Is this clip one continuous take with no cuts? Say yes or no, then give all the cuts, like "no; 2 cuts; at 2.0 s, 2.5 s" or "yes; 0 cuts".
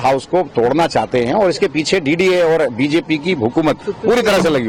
yes; 0 cuts